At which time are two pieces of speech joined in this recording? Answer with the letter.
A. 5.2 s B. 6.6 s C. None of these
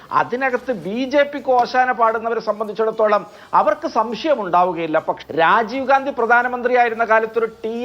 A